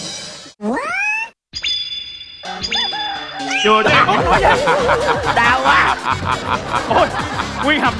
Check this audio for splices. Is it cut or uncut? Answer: uncut